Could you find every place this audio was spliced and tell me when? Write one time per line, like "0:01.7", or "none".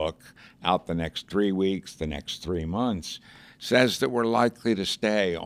none